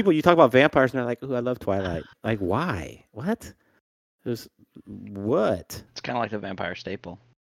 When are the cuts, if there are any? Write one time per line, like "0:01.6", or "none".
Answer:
none